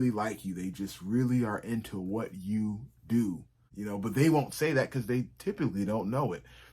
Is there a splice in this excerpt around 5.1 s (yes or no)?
no